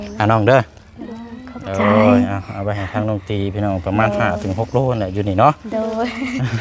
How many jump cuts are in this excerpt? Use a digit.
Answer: 0